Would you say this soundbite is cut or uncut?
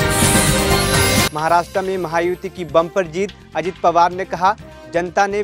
cut